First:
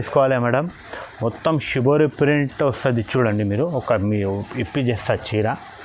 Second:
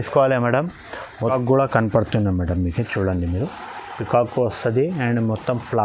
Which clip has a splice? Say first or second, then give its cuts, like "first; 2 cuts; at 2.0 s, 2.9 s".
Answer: second; 1 cut; at 1.3 s